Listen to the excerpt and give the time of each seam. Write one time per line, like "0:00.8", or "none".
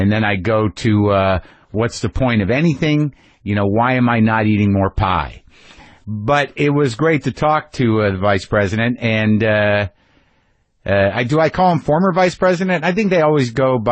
0:08.2